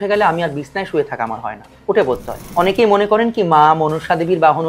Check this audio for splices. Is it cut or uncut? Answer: cut